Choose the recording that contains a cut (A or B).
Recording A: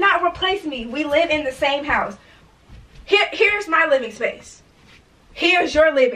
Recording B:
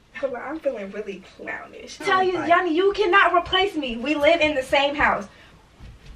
B